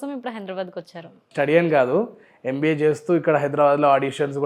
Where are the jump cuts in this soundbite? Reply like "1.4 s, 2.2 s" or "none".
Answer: 1.2 s